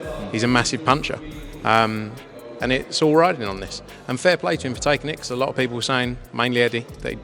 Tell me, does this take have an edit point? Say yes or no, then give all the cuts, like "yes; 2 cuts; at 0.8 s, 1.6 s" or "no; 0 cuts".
no; 0 cuts